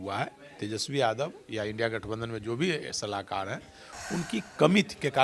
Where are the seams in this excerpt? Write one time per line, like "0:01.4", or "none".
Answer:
none